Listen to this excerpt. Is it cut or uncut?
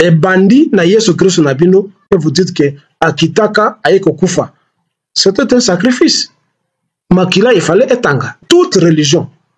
cut